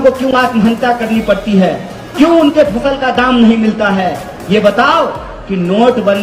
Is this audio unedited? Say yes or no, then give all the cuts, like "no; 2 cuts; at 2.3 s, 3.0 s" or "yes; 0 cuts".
yes; 0 cuts